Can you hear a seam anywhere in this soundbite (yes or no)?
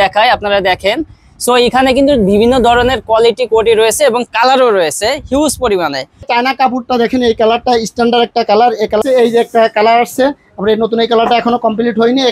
yes